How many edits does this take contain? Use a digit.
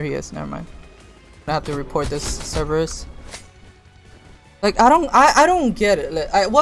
1